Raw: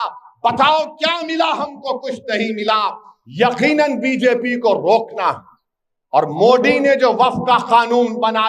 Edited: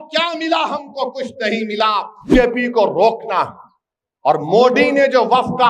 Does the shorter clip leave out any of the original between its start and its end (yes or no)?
yes